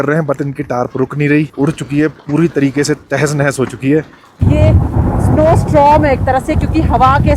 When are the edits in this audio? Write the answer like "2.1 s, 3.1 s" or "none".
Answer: 1.5 s, 4.4 s